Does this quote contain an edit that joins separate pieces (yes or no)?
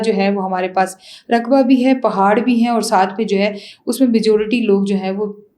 no